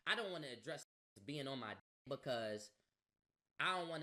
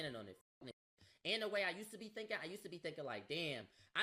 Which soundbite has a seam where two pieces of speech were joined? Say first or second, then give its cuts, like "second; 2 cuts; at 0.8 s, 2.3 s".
second; 1 cut; at 3.0 s